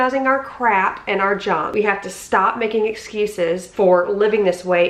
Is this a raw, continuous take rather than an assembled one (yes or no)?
no